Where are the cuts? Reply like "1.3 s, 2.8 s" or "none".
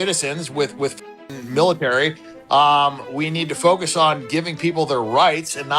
2.2 s

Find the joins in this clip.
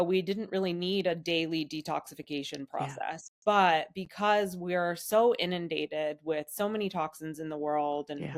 none

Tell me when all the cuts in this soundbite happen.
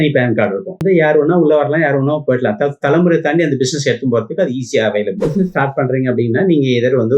0.8 s, 5.2 s

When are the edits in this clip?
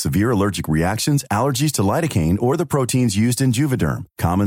none

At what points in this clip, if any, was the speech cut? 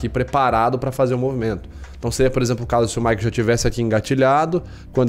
none

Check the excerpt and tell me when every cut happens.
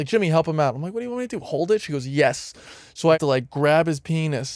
3.2 s

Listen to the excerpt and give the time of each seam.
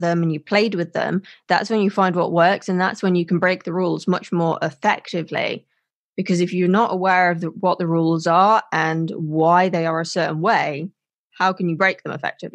none

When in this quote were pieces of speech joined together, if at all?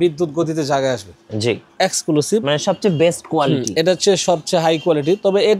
1.7 s

